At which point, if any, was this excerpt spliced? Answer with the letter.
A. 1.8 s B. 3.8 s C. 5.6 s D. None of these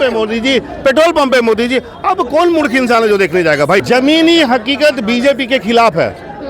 B